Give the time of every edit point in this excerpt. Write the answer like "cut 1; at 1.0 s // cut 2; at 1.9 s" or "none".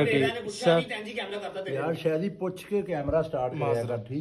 none